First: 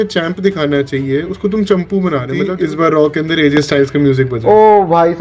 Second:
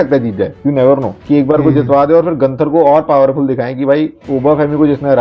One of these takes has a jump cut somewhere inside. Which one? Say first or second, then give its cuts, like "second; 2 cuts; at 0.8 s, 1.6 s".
first; 1 cut; at 2.5 s